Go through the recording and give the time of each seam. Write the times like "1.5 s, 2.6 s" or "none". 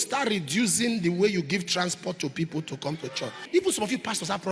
3.4 s